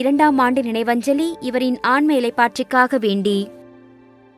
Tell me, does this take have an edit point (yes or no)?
yes